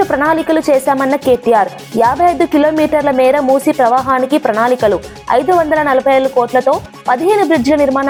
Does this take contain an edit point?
no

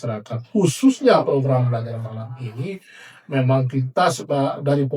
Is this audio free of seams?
yes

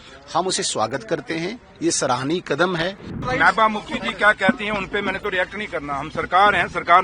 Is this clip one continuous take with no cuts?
no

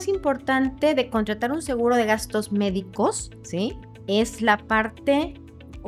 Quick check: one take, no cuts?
yes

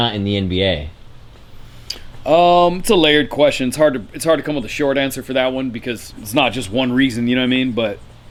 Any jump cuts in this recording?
no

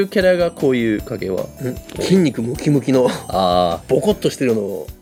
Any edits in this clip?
no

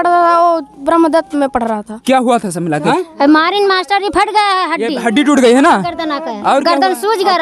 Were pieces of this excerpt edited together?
yes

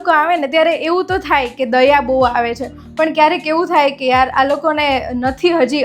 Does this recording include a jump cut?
no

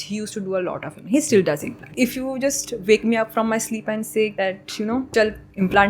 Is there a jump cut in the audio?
yes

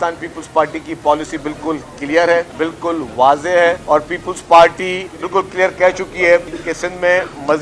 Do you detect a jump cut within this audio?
yes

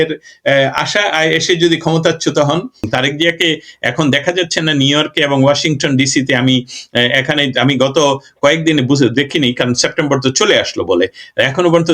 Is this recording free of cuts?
no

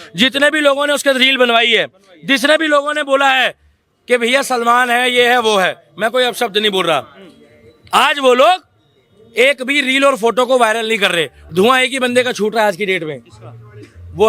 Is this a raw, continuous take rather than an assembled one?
no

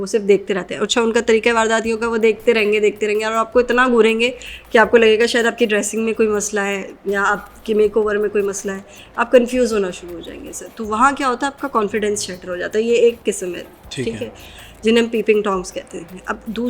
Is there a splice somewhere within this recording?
no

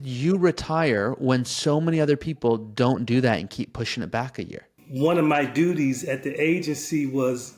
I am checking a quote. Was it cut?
yes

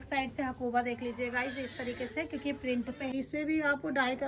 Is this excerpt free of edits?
no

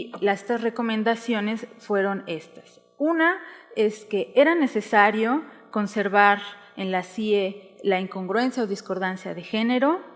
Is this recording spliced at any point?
yes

